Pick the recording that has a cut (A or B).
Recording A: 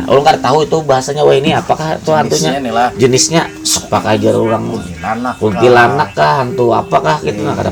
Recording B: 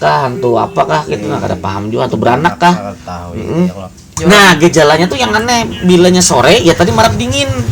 B